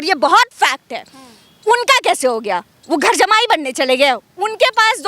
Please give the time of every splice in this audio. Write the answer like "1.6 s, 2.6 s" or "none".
none